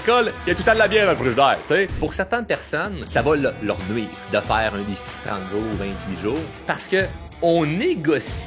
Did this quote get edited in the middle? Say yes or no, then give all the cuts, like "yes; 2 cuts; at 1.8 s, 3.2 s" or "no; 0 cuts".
yes; 4 cuts; at 2.0 s, 3.0 s, 4.2 s, 6.5 s